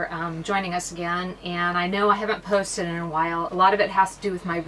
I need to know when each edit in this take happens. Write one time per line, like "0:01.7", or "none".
0:03.5